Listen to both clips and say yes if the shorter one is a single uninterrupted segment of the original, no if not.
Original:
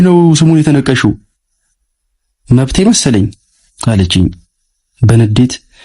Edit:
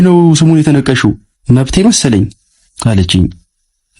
no